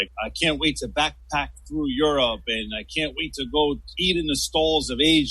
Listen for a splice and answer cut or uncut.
cut